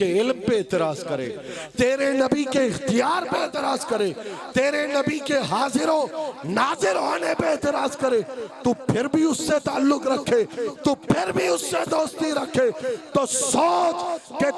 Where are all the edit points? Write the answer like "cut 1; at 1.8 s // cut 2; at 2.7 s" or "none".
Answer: none